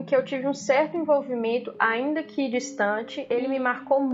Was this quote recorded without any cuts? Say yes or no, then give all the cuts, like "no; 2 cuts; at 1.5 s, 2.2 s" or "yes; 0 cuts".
no; 1 cut; at 3.2 s